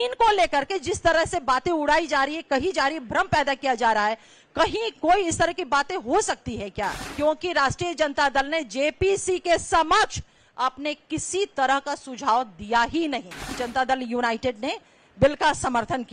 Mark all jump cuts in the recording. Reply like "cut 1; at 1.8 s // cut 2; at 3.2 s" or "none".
cut 1; at 7.0 s // cut 2; at 13.6 s